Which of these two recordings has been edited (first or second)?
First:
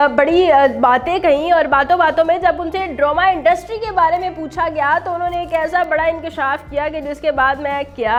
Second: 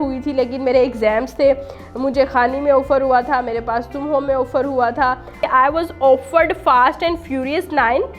second